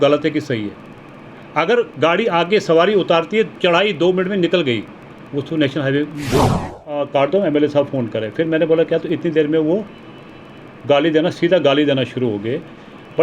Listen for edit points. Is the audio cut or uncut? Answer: cut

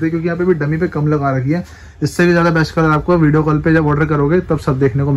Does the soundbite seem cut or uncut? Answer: uncut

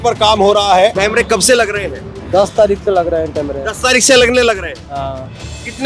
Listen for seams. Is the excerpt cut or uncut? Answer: cut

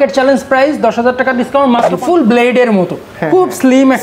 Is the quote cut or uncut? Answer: cut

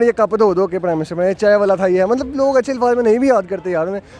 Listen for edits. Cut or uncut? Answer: uncut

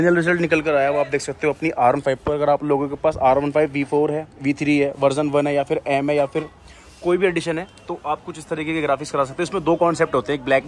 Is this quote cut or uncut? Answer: uncut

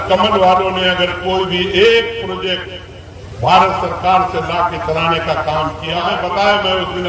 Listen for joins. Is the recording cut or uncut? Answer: cut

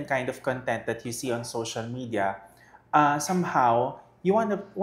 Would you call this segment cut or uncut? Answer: uncut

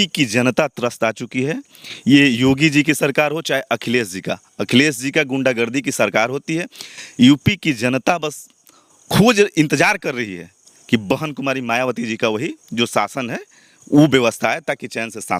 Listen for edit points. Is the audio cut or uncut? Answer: uncut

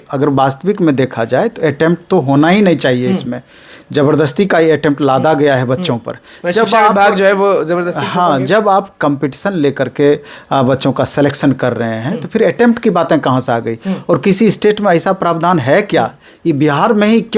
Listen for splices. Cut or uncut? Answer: uncut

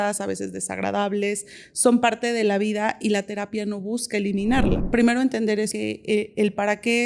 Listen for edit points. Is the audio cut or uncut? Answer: cut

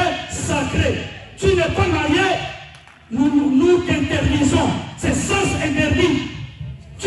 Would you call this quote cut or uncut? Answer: uncut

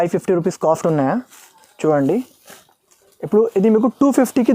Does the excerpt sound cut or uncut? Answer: uncut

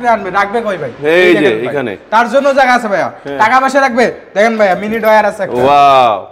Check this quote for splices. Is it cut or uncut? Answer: uncut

